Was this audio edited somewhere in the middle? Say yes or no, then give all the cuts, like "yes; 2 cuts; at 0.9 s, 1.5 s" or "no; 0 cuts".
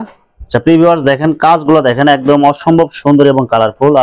no; 0 cuts